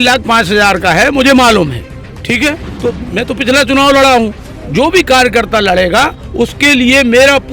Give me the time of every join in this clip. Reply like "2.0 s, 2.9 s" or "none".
2.7 s

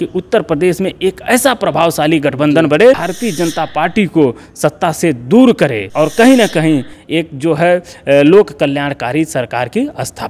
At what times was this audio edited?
3.1 s, 5.8 s

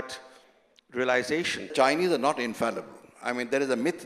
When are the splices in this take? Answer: 1.7 s

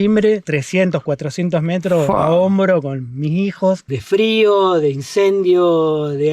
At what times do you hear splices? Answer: 3.9 s

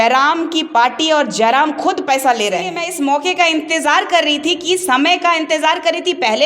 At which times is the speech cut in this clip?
none

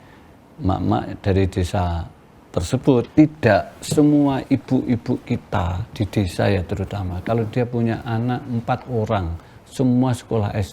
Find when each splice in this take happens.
3.1 s

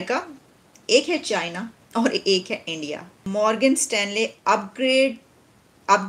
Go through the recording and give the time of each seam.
3.2 s

